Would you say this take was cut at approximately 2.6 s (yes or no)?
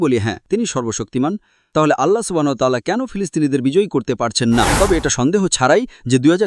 no